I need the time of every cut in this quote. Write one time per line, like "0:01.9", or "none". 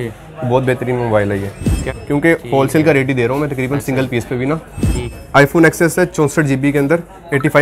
0:01.9
0:05.1

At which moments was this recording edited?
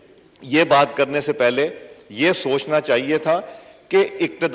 none

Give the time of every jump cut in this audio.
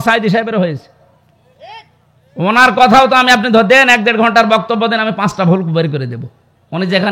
none

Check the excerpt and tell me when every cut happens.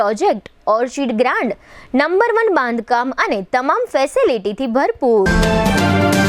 0:05.3

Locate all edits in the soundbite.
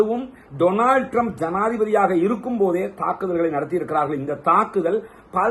none

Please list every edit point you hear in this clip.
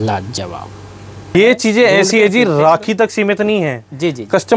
0:01.3

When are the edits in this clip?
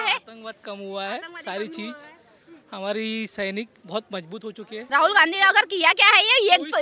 0:04.7

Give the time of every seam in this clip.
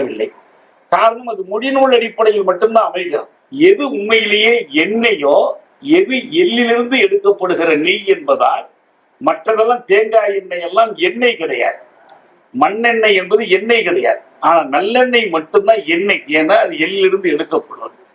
0:03.4

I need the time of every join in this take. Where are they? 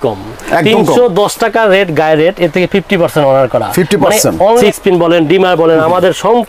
0:04.6

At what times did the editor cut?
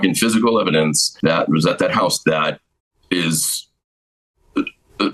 none

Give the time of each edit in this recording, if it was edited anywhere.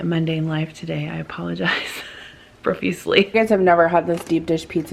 0:03.3

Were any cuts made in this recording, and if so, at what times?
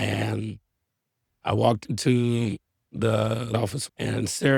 0:03.5

